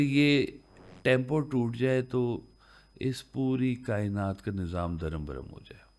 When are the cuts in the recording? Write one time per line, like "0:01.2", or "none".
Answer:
none